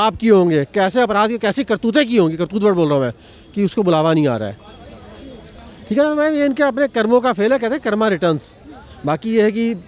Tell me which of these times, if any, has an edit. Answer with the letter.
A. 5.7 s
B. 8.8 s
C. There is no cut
C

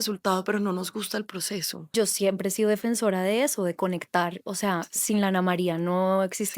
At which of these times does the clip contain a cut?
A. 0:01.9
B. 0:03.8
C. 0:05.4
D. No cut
A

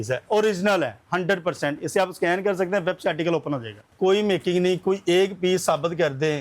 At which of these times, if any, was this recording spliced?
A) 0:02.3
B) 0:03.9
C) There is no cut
B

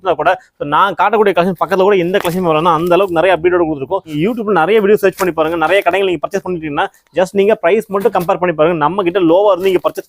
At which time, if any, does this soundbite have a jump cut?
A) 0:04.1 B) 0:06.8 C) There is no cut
A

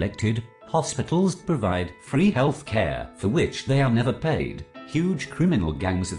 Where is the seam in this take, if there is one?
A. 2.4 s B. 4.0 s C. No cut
C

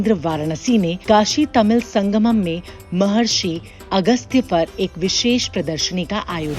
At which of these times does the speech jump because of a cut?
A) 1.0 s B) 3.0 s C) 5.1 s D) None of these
A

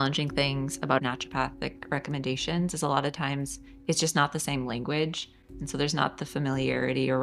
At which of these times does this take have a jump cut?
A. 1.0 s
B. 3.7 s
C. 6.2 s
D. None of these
A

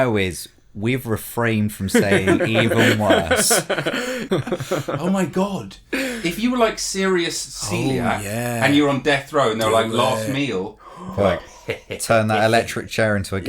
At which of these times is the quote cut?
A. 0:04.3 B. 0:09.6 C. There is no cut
A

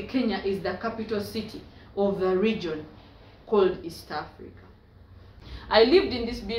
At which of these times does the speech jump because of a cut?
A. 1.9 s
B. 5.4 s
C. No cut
B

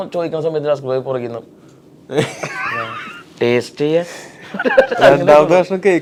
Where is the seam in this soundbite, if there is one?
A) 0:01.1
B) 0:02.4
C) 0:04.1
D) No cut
D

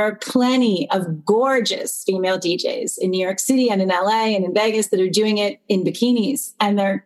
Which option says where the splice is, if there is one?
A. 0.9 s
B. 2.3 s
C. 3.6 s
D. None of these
D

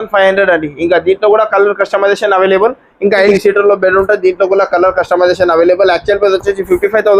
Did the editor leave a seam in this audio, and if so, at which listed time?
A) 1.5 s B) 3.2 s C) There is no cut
B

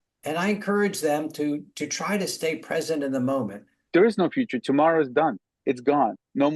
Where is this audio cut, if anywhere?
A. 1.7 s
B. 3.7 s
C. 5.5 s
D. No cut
B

